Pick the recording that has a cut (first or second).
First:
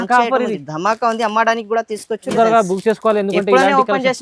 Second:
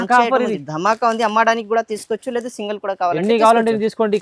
first